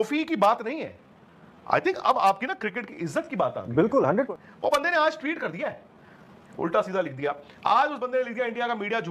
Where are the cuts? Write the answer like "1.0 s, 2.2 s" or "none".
4.3 s, 6.4 s

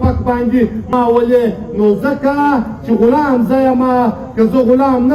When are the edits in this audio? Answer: 0.9 s

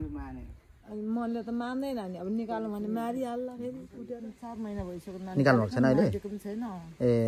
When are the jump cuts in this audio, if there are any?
4.2 s

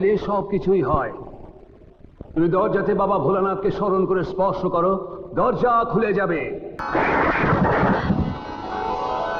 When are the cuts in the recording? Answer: 6.8 s

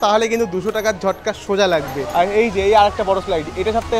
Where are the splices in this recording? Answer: 2.0 s

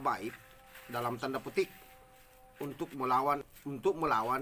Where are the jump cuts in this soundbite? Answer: 3.5 s

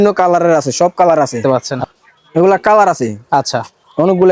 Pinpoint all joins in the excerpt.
1.4 s

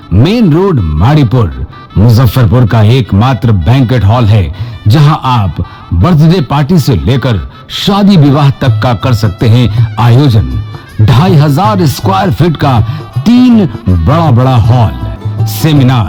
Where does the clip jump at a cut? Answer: none

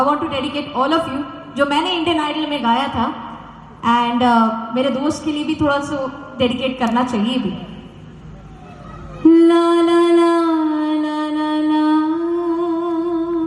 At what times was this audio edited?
8.7 s

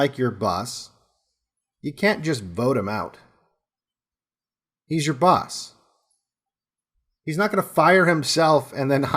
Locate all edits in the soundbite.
7.1 s

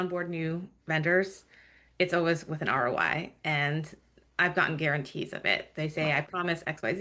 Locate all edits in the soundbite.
none

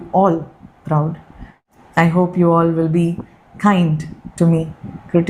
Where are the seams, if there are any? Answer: 1.6 s

